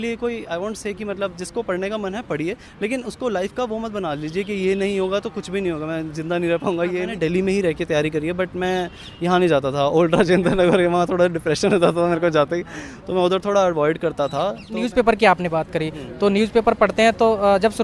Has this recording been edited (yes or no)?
yes